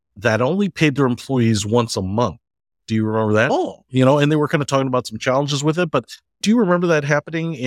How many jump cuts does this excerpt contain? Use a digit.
1